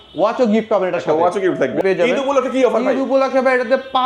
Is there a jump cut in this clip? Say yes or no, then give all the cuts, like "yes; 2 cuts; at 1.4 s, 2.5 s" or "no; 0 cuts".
yes; 1 cut; at 1.8 s